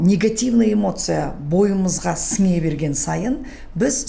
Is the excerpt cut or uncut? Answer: uncut